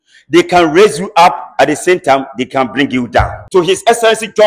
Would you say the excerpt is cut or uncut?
cut